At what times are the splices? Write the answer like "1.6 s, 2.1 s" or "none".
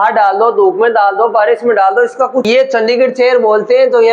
2.5 s

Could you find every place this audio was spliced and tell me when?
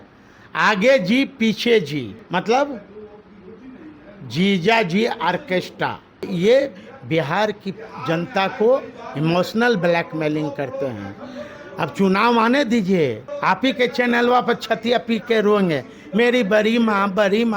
2.2 s, 6.3 s, 13.3 s

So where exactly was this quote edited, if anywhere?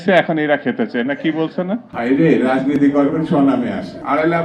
1.9 s

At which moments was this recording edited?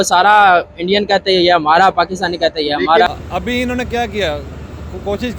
3.1 s

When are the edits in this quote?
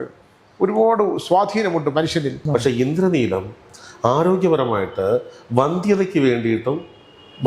2.4 s

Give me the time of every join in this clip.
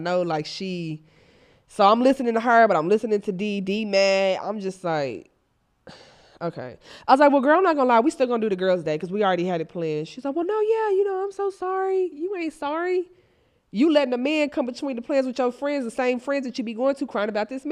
15.4 s

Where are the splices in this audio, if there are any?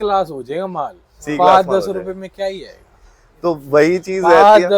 none

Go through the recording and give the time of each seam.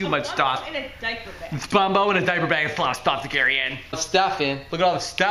4.0 s

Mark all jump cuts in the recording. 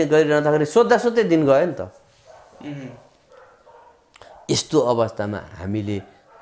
none

